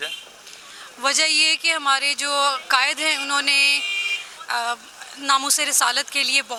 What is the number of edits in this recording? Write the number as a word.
zero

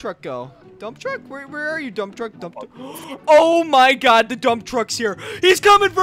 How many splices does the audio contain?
zero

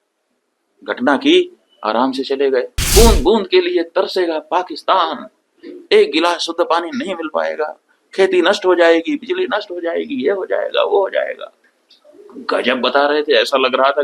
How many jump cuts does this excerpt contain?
one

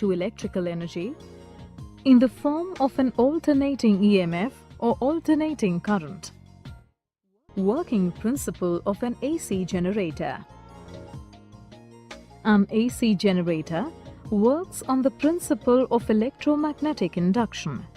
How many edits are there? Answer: one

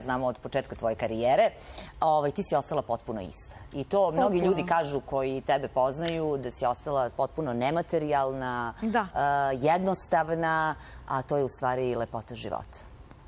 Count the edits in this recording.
zero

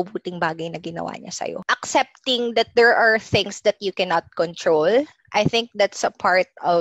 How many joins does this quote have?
one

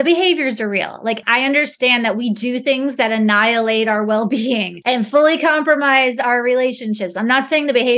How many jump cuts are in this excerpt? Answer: two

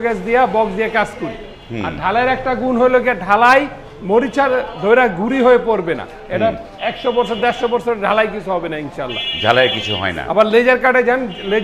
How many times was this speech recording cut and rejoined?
zero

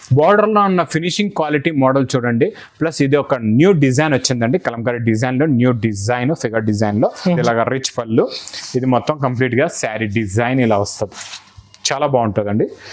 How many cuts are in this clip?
one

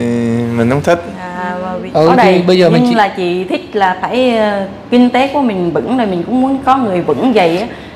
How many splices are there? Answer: one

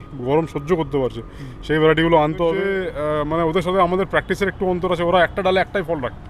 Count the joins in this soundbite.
one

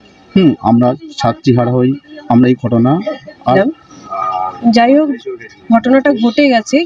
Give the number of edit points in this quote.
one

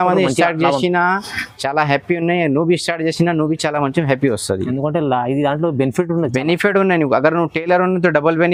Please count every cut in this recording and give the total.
zero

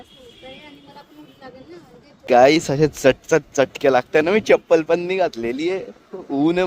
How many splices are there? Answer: one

